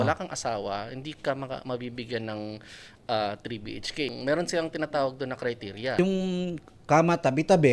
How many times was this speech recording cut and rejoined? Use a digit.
2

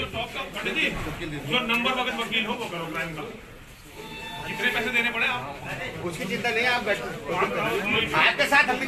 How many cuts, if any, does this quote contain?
0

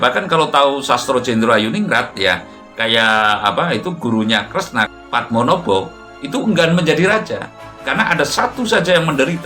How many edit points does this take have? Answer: 1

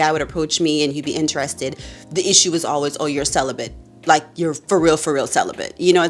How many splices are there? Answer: 0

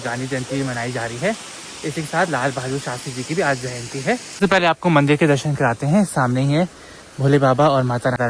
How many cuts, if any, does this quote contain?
0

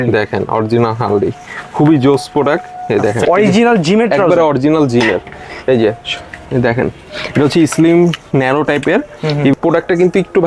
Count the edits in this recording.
2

